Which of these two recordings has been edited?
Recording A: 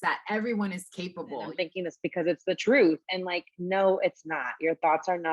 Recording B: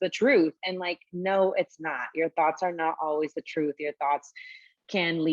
A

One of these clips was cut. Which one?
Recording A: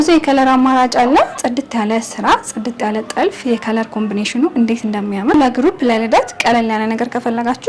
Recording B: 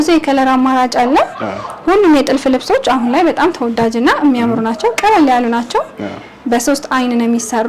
A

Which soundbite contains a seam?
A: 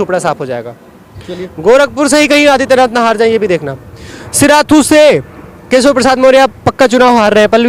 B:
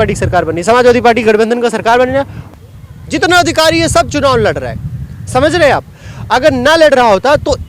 B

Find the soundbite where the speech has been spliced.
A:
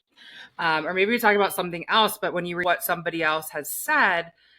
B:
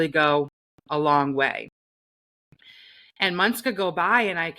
A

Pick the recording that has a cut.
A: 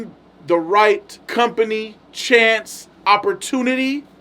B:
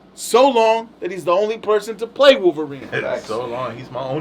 A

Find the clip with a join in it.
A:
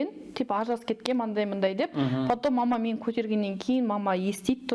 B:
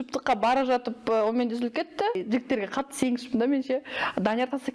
B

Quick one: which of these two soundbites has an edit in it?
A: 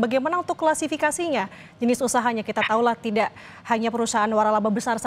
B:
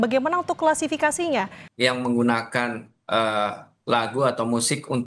B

